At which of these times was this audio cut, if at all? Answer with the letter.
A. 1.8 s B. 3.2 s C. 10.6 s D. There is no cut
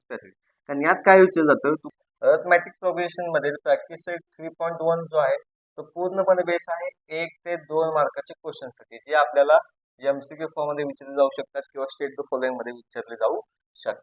A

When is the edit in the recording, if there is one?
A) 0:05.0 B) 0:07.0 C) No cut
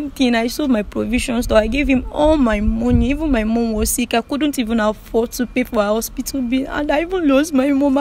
C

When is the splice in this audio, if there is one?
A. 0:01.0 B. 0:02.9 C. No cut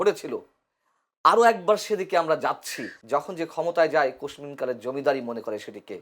B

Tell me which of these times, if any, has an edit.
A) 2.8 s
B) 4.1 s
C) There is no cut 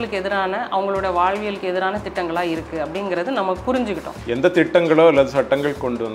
B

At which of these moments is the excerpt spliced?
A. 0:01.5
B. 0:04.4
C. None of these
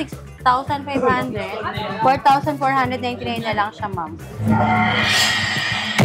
B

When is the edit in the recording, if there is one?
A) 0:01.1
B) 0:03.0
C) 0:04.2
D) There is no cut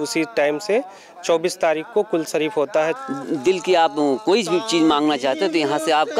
B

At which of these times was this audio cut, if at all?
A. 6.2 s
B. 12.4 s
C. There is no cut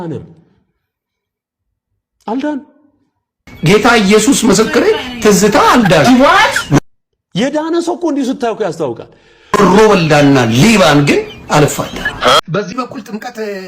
B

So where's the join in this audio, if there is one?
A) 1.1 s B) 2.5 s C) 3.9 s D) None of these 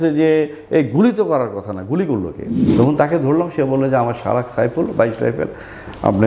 B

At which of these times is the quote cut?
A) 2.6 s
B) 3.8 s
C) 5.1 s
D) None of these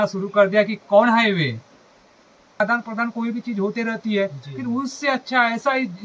A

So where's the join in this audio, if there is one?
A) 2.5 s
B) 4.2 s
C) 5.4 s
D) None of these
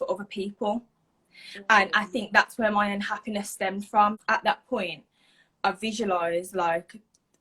B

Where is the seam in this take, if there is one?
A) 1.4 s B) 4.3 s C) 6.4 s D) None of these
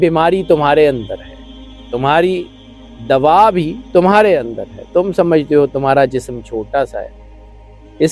D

